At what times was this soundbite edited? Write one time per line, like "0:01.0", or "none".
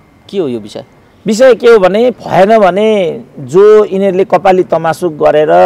0:02.2